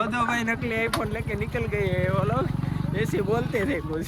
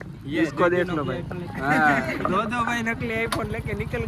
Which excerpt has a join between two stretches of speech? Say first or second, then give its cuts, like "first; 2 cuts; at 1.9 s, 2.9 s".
second; 1 cut; at 1.5 s